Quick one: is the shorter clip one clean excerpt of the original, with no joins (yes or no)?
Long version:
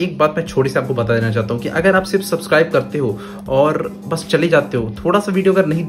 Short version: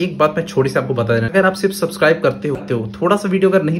no